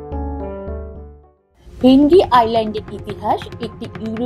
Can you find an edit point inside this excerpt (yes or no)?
yes